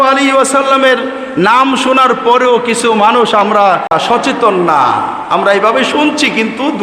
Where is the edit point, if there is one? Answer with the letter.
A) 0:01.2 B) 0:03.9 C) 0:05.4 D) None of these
B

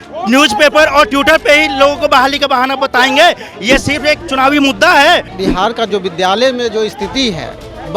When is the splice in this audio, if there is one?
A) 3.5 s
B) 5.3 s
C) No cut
B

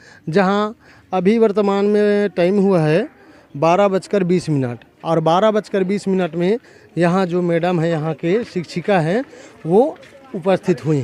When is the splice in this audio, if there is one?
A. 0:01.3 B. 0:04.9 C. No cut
C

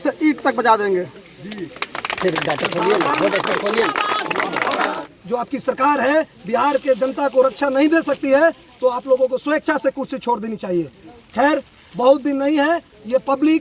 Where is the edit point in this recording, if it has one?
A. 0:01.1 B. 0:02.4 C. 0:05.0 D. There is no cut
C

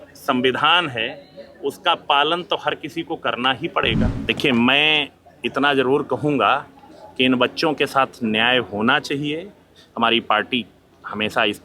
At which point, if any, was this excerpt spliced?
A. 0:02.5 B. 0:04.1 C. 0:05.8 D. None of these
B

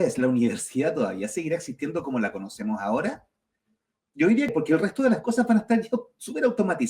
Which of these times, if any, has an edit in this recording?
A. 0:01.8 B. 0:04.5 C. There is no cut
B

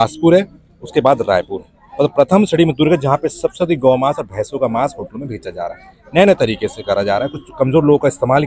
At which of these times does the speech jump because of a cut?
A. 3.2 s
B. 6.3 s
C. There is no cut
C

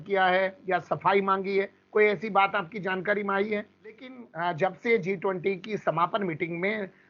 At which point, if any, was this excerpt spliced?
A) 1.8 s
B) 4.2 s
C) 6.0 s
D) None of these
B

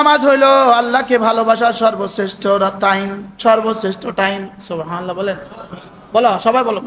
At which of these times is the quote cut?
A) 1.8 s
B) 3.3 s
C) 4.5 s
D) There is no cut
D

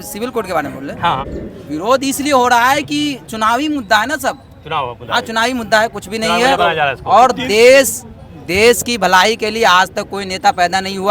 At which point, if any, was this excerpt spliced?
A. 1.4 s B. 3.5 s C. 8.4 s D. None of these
A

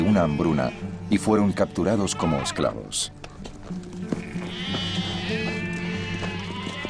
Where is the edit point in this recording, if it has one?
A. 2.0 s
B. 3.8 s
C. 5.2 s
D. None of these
B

